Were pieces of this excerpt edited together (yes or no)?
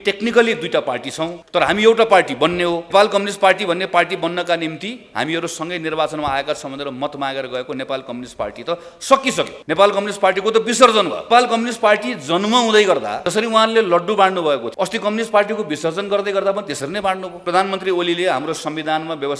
yes